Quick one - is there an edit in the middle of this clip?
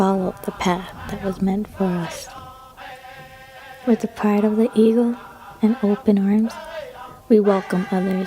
yes; 2 cuts; at 2.1 s, 3.9 s

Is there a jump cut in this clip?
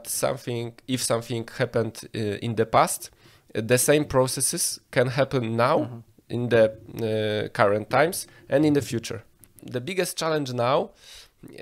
yes; 1 cut; at 9.7 s

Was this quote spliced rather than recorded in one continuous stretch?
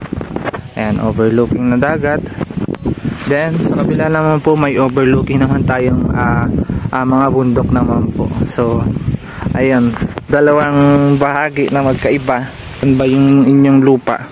yes; 1 cut; at 12.8 s

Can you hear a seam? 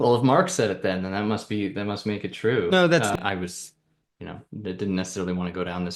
yes; 1 cut; at 3.1 s

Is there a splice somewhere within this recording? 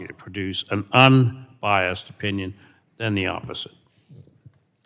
no; 0 cuts

